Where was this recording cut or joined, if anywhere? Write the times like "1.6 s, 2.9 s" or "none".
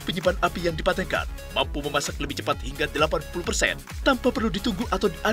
none